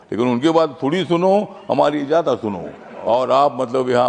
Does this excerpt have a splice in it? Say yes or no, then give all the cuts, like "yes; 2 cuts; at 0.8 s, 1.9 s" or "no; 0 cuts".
yes; 1 cut; at 2.9 s